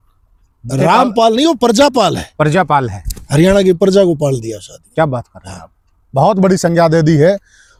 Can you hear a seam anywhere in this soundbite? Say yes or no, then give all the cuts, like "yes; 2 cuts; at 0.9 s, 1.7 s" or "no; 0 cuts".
no; 0 cuts